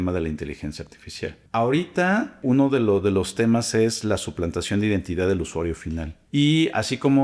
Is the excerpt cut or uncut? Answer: cut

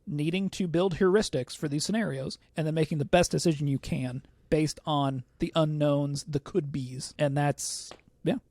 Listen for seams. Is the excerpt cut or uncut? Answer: cut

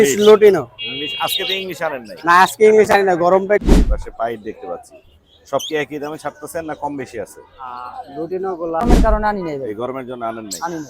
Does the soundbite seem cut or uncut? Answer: cut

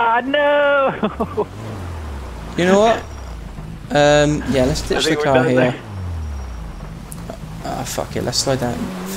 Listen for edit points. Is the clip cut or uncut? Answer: uncut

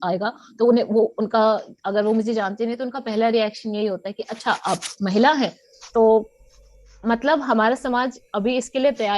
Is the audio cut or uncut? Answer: uncut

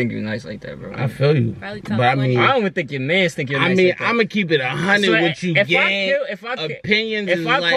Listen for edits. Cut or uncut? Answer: uncut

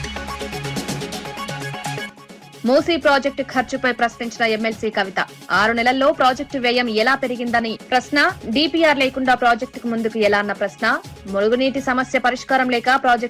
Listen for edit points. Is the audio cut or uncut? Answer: cut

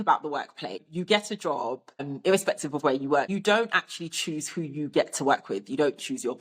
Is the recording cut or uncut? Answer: cut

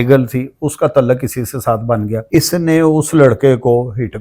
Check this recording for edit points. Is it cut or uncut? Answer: cut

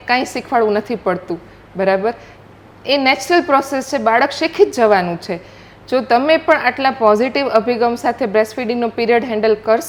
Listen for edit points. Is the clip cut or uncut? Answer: uncut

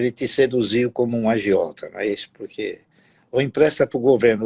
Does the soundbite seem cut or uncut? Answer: uncut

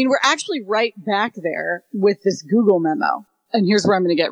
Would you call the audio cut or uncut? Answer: cut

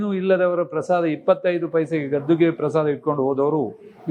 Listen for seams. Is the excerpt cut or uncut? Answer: uncut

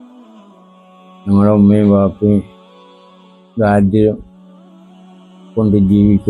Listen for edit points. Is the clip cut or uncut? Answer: cut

